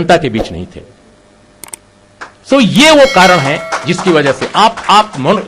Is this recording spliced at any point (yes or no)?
no